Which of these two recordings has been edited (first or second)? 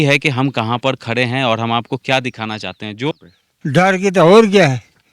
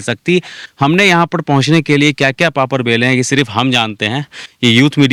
first